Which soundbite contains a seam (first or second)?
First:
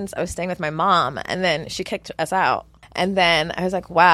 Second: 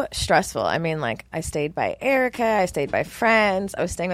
first